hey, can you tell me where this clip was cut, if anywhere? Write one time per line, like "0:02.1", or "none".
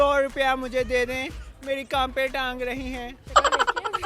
0:03.1